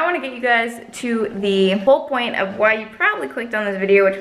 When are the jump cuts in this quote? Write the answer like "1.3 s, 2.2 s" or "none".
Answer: 1.8 s